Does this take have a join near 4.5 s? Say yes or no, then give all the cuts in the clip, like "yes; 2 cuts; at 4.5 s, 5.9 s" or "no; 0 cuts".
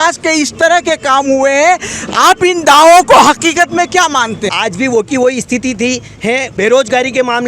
yes; 2 cuts; at 4.5 s, 6.5 s